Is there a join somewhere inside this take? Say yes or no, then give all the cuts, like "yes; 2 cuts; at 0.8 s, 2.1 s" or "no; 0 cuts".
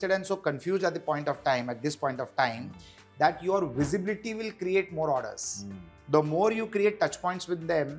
no; 0 cuts